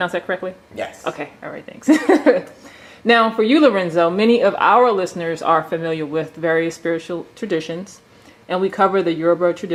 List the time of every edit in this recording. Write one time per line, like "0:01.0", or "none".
none